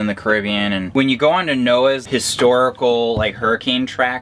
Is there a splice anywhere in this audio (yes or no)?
yes